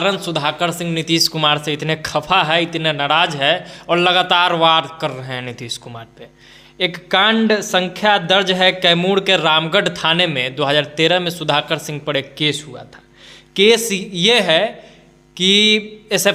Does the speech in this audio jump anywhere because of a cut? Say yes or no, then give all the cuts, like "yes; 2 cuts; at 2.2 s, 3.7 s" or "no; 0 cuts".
no; 0 cuts